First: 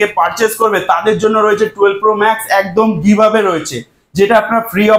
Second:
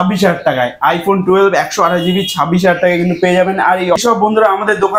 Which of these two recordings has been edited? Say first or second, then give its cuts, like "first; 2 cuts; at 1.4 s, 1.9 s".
second; 1 cut; at 4.0 s